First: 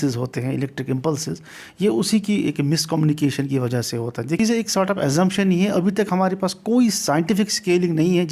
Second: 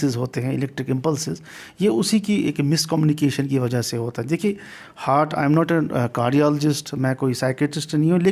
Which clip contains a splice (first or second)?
first